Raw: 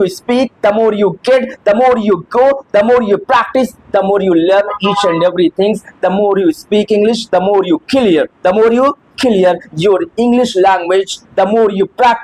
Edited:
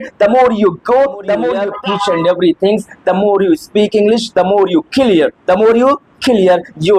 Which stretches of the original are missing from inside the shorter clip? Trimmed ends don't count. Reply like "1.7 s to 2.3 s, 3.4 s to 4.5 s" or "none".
3.2 s to 4.7 s